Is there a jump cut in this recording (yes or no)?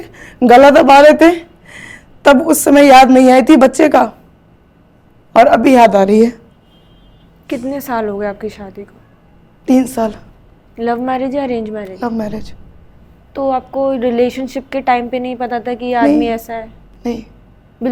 no